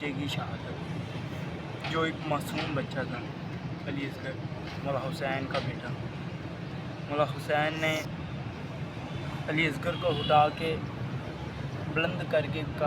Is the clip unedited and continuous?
no; 1 cut; at 8.1 s

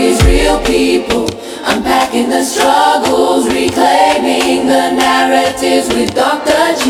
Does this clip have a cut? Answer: no; 0 cuts

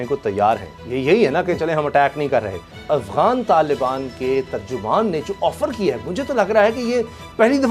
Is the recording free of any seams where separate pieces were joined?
no; 1 cut; at 2.8 s

